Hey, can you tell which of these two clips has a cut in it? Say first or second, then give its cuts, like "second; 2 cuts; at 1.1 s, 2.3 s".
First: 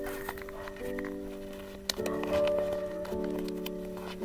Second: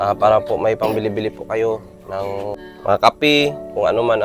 second; 1 cut; at 2.6 s